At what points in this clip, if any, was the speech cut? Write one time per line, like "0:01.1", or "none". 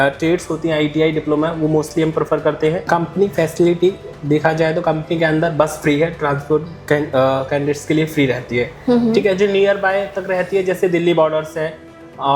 0:02.8